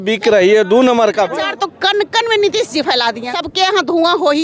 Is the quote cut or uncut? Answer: cut